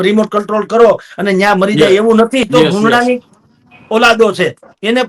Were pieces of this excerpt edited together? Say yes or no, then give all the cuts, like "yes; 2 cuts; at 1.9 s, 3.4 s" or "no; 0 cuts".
yes; 1 cut; at 2.4 s